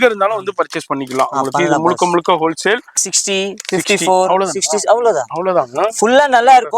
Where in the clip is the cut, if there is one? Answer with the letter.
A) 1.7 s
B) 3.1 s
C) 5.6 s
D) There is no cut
B